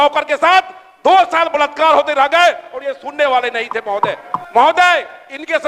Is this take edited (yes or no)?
no